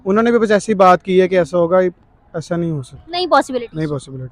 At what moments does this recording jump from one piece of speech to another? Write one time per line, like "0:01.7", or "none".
none

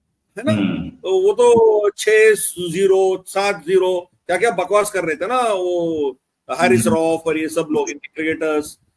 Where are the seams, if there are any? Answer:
none

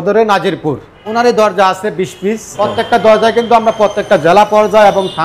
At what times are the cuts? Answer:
0:01.0
0:02.6

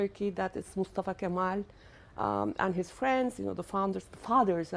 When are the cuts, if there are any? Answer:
0:02.1

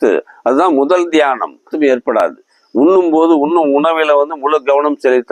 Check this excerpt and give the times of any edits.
0:01.7

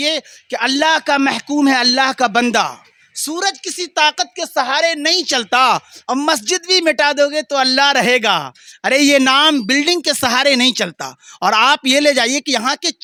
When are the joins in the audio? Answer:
none

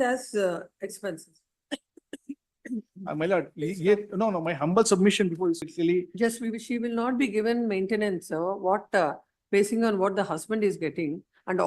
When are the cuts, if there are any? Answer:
0:05.6

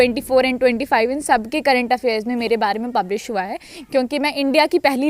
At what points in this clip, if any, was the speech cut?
none

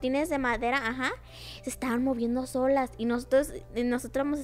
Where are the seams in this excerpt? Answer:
none

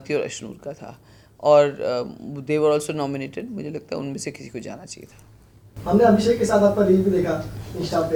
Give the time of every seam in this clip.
none

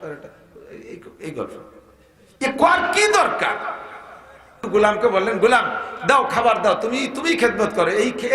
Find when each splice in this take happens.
0:04.6

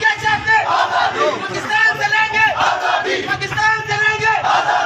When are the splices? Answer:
none

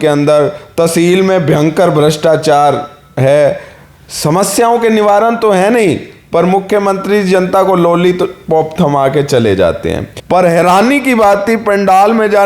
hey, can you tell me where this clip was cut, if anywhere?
0:10.1

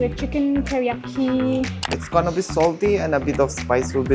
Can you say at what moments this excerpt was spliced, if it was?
0:01.9

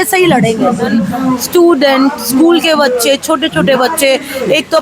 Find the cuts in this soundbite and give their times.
0:01.1

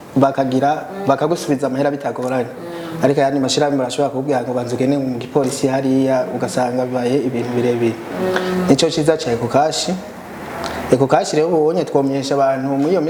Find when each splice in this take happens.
none

